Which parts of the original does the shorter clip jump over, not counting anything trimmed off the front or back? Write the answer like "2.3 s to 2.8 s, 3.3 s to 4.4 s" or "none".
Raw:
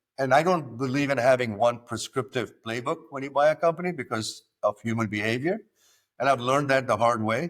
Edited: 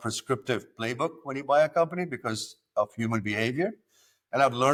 none